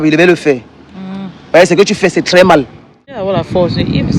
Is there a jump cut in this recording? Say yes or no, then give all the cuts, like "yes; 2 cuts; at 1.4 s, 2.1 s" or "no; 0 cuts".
yes; 1 cut; at 3.2 s